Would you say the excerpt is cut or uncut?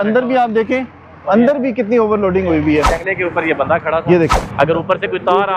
cut